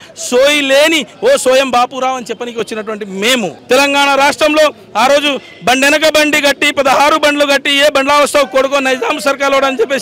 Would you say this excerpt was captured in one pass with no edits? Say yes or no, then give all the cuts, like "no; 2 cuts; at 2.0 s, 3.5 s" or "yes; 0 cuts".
no; 1 cut; at 3.6 s